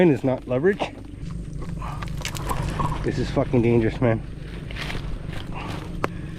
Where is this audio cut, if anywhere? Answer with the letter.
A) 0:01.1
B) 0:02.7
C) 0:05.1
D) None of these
A